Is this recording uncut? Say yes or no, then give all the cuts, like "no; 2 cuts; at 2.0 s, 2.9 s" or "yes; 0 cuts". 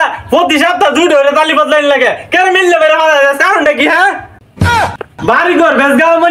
no; 1 cut; at 5.2 s